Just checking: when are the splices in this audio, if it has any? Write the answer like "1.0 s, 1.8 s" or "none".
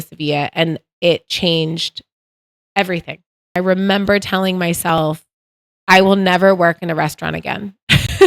3.6 s